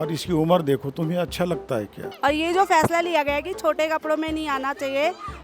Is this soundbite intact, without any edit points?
no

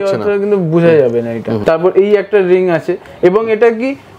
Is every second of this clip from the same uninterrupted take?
no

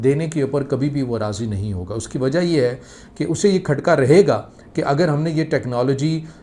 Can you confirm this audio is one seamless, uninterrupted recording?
yes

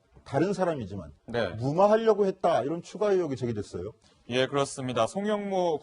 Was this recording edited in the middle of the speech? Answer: yes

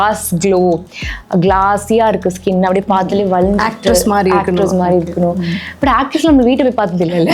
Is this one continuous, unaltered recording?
yes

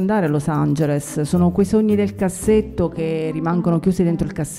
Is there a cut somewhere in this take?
no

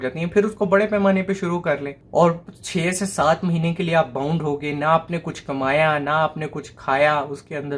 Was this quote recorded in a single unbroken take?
no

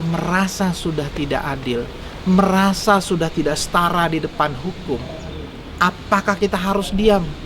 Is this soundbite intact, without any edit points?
yes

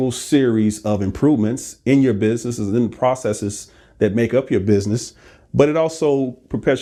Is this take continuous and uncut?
yes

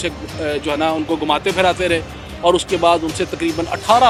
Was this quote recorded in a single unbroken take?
yes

